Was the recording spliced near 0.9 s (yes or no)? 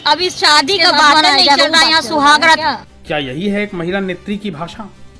no